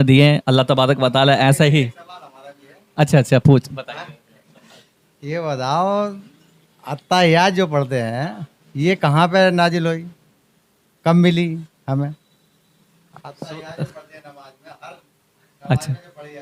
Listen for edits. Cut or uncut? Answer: uncut